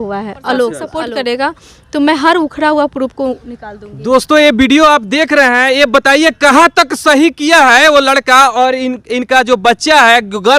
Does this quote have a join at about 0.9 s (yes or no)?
yes